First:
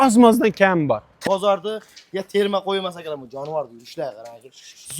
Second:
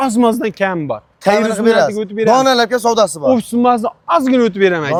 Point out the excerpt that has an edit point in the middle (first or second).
first